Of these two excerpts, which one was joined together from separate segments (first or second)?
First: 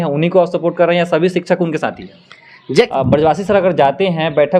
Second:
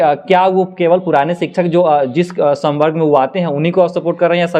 first